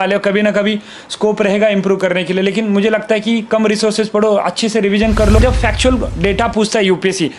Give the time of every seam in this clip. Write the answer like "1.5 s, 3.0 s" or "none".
5.4 s

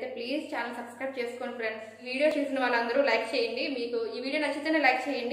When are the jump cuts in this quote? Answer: 2.3 s

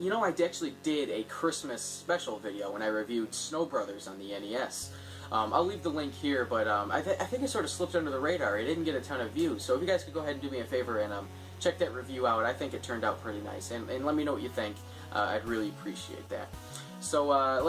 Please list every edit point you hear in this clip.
1.9 s

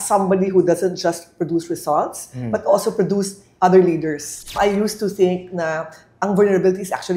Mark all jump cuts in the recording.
4.5 s

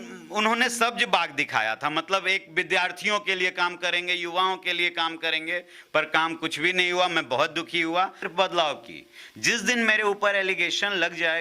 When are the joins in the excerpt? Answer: 8.3 s

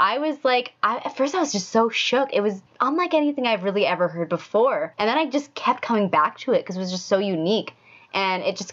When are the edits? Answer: 2.7 s, 4.9 s

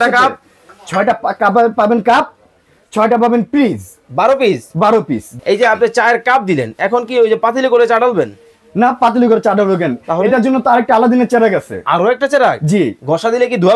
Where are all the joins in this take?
5.2 s

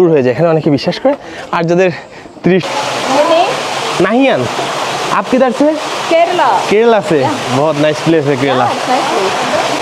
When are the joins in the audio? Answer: 2.7 s

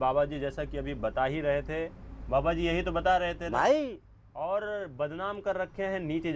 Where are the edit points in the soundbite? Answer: 2.1 s

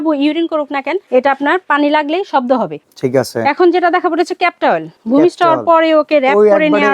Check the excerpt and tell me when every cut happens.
1.0 s, 2.8 s, 4.9 s

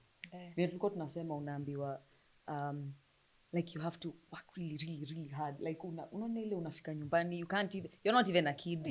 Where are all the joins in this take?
none

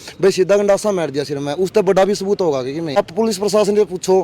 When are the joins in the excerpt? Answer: 3.0 s

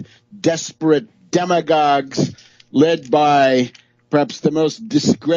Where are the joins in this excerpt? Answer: 1.0 s

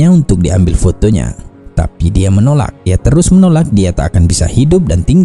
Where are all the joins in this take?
2.9 s

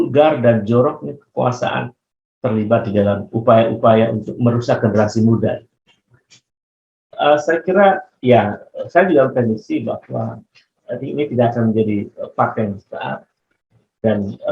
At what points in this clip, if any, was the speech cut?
7.0 s

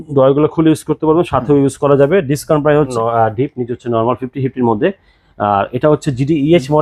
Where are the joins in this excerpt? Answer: 2.9 s

